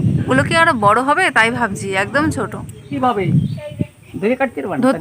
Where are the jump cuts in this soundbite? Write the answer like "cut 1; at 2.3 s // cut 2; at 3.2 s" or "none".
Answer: cut 1; at 2.9 s